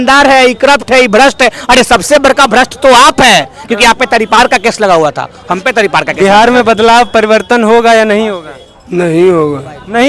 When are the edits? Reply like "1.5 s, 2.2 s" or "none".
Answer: 6.1 s

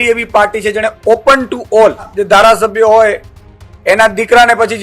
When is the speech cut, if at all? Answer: 2.1 s

